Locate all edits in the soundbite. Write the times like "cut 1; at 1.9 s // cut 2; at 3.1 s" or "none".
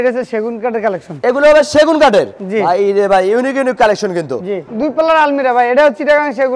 cut 1; at 4.6 s